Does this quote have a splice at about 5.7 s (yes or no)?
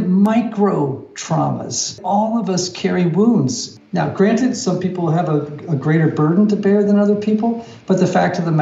no